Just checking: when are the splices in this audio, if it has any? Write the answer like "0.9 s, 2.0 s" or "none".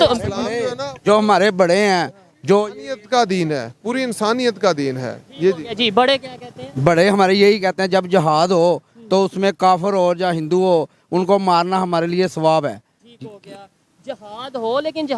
none